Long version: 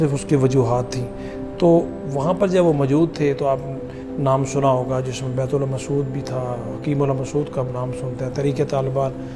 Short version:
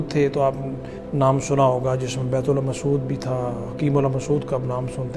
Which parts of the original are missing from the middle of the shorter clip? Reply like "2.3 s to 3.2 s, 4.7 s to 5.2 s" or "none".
none